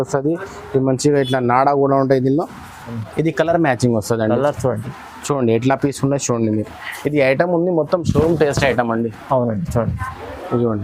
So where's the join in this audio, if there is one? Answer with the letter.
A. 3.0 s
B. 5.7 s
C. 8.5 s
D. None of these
A